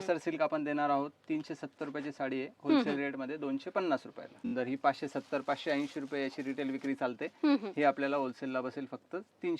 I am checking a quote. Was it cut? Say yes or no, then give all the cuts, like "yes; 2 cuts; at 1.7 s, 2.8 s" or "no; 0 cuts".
yes; 1 cut; at 4.5 s